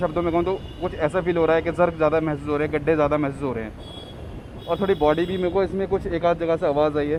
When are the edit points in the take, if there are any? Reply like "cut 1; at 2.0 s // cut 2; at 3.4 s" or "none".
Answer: none